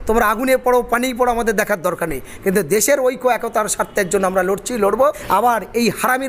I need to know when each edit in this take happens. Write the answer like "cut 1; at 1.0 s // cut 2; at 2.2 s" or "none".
cut 1; at 5.2 s